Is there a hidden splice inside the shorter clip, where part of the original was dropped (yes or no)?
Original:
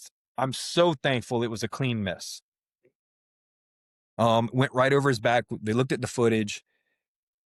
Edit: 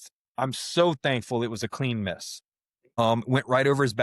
yes